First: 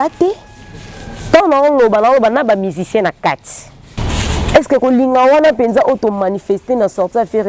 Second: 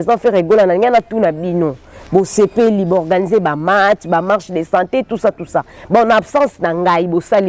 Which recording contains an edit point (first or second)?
first